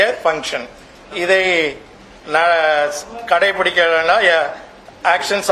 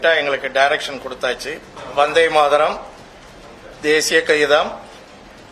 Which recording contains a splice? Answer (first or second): second